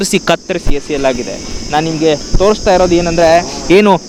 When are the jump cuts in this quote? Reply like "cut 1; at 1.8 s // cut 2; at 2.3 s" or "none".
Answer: none